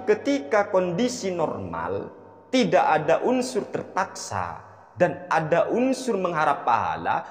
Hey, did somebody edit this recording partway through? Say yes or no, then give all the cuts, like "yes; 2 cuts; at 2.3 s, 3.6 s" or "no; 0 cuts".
no; 0 cuts